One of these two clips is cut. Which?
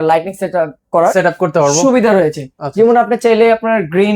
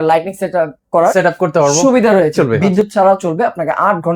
second; 1 cut; at 2.3 s

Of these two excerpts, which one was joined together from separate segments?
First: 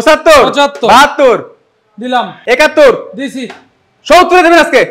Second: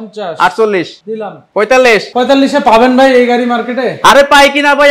second; 2 cuts; at 1.4 s, 2.1 s

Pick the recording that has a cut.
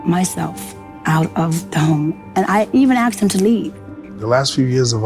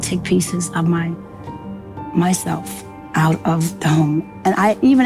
first; 1 cut; at 4.1 s

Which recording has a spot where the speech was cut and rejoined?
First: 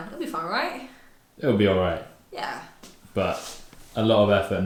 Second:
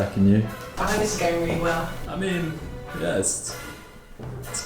second; 3 cuts; at 0.8 s, 1.8 s, 2.8 s

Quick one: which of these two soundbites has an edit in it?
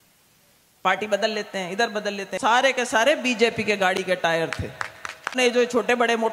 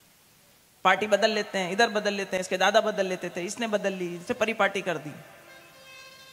first; 2 cuts; at 2.4 s, 5.3 s

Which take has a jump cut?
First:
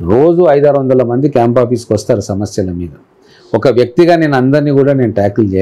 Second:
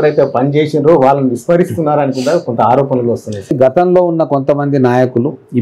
second; 1 cut; at 3.5 s

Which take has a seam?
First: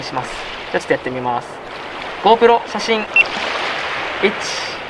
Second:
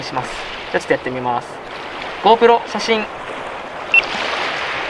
first; 1 cut; at 3.1 s

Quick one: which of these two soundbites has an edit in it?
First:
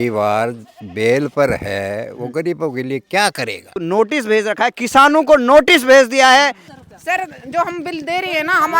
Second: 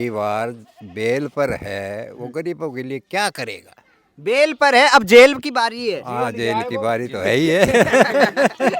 first; 2 cuts; at 3.6 s, 6.7 s

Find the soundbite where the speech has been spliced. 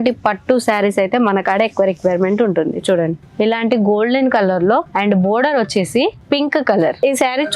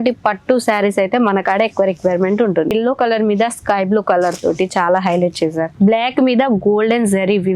second; 2 cuts; at 2.7 s, 5.7 s

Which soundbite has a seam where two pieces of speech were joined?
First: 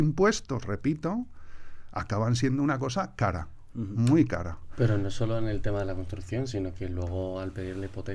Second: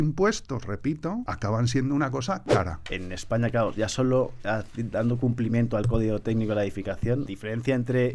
second; 3 cuts; at 1.3 s, 2.9 s, 7.3 s

